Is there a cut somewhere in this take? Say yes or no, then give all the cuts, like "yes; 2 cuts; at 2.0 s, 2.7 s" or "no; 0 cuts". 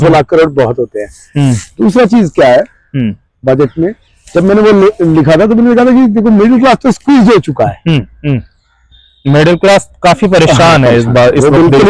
no; 0 cuts